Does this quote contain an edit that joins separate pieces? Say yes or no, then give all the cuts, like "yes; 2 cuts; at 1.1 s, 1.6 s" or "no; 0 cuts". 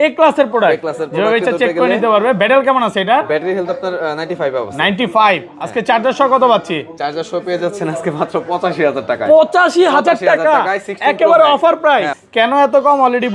yes; 1 cut; at 12.2 s